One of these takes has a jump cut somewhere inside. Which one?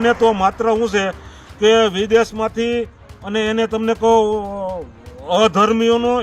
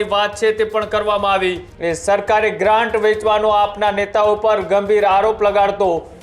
second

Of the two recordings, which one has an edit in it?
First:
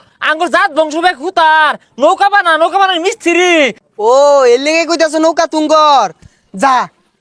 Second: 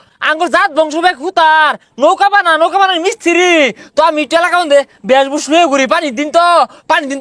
first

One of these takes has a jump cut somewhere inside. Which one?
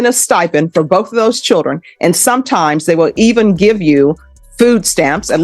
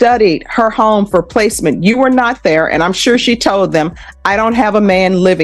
first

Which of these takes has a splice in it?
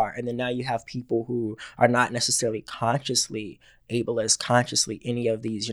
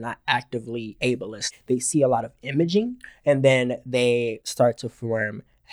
second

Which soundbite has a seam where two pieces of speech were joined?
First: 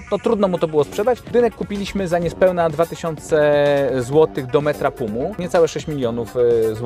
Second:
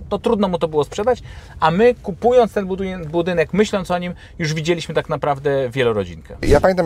first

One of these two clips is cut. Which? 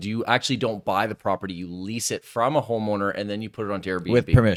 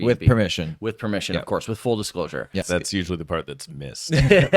second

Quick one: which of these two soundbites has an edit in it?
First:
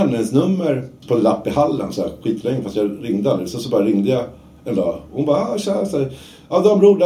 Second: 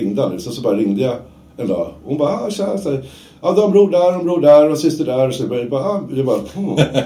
first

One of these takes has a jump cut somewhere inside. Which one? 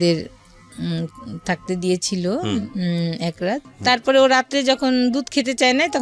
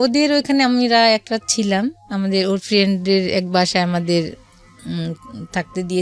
first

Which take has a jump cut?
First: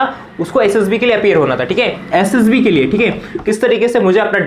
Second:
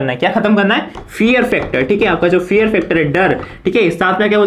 first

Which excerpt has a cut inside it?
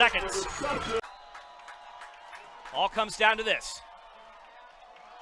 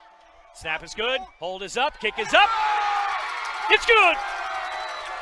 first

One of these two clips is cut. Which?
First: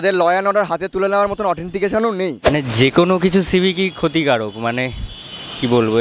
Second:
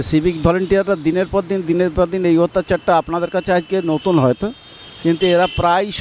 first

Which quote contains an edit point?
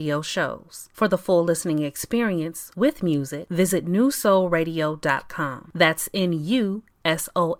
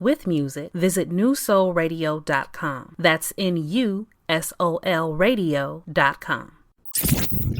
second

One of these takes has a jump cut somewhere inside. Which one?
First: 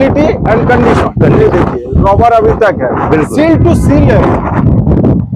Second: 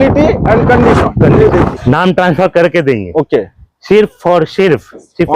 second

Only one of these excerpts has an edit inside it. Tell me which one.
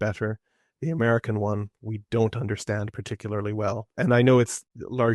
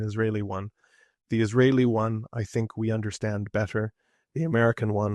first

